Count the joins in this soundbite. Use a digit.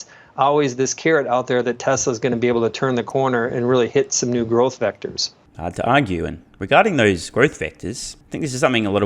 0